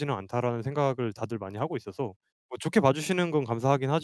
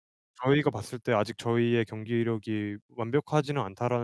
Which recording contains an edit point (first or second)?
first